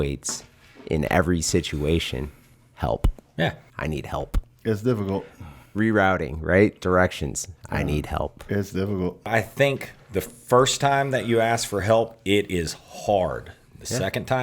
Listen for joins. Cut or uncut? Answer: cut